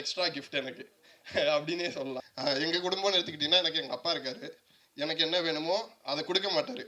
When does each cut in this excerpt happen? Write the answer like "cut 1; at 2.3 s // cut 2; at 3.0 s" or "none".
cut 1; at 2.2 s